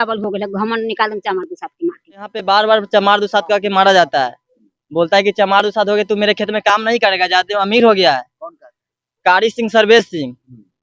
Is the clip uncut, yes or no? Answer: no